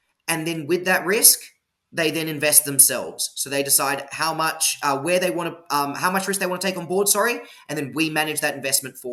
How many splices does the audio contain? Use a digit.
0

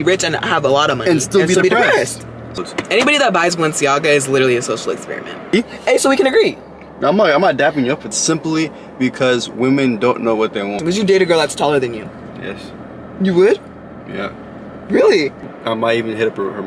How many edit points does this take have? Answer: 5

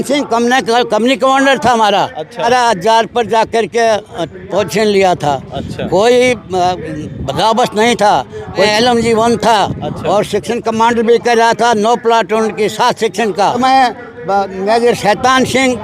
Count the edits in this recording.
3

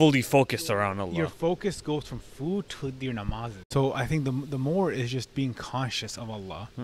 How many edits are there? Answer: 1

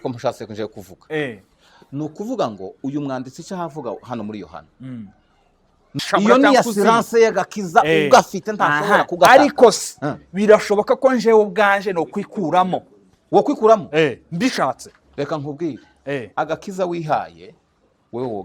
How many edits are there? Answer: 1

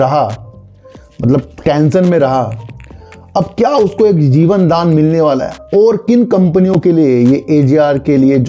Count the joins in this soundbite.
0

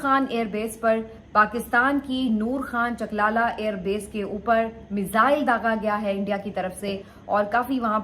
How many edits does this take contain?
1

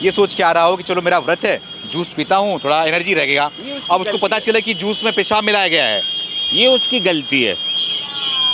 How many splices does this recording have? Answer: 0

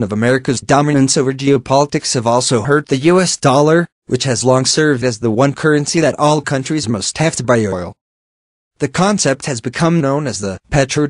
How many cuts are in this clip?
1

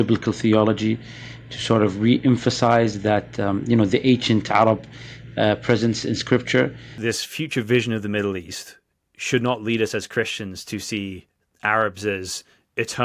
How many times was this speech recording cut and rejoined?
1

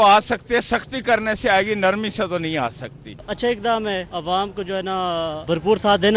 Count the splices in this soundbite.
2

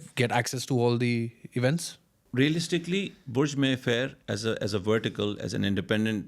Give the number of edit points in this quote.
1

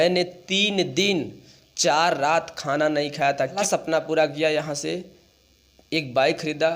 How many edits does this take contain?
1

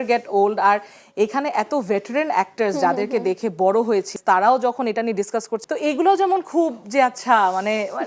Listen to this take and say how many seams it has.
2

